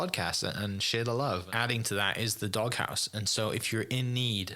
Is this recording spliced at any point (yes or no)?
yes